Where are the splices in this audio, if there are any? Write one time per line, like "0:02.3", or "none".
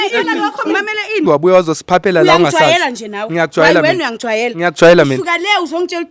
0:01.2